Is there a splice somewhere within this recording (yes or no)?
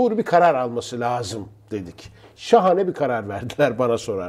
no